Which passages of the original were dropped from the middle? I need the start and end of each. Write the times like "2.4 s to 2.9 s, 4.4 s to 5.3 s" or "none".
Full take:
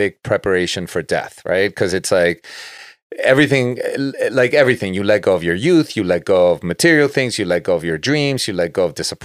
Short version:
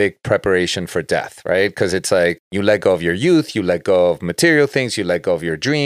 2.5 s to 4.9 s